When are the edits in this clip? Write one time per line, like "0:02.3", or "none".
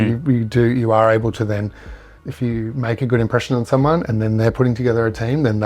0:02.2